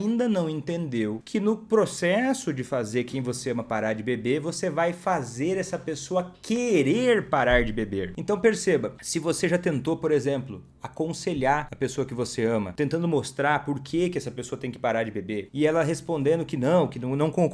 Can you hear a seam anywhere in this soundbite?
yes; 6 cuts; at 1.2 s, 8.1 s, 9.0 s, 11.7 s, 12.7 s, 15.5 s

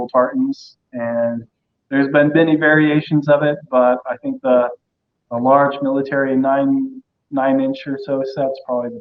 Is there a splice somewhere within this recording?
no; 0 cuts

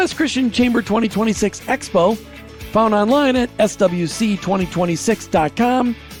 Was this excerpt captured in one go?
yes; 0 cuts

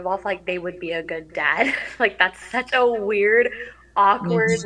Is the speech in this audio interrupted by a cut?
no; 0 cuts

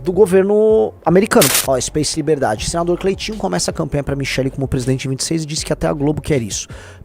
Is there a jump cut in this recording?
yes; 1 cut; at 1.6 s

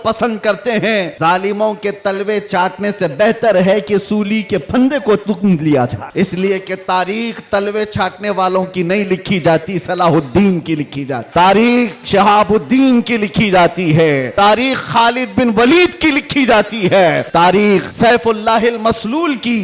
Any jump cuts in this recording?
yes; 6 cuts; at 1.1 s, 6.0 s, 11.2 s, 14.3 s, 17.2 s, 17.9 s

